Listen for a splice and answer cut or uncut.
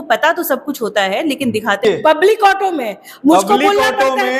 cut